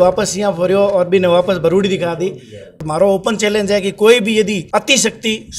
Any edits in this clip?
yes; 2 cuts; at 2.9 s, 4.6 s

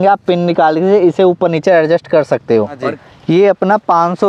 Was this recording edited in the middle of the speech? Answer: yes; 1 cut; at 2.9 s

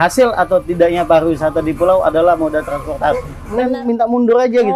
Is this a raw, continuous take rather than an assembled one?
no; 1 cut; at 3.4 s

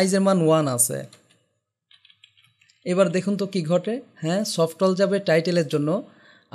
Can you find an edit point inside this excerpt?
no; 0 cuts

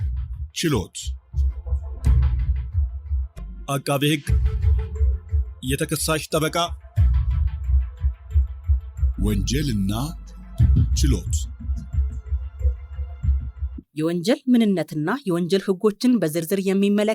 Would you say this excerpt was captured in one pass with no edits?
no; 1 cut; at 1.0 s

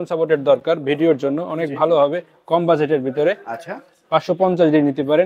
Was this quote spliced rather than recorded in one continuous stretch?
no; 0 cuts

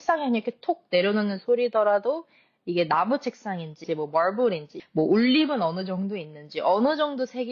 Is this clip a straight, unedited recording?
no; 2 cuts; at 3.8 s, 4.7 s

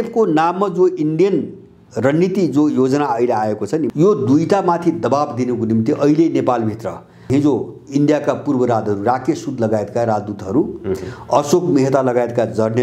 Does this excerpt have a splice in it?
yes; 2 cuts; at 3.9 s, 7.3 s

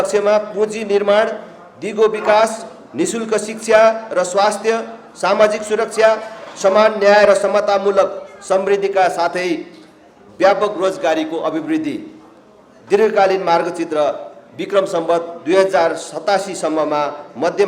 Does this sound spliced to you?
no; 0 cuts

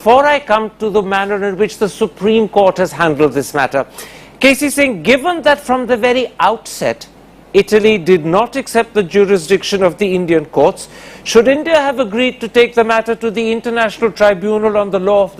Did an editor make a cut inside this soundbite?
yes; 1 cut; at 11.3 s

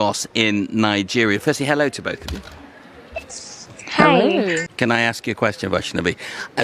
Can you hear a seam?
yes; 1 cut; at 4.7 s

